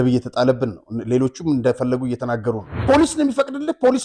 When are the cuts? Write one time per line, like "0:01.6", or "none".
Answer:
0:02.8